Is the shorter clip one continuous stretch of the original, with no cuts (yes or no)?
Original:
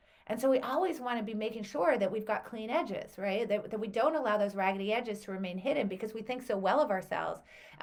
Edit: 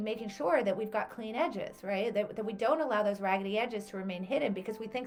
yes